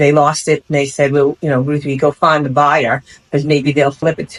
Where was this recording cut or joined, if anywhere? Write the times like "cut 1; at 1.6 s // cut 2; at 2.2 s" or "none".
none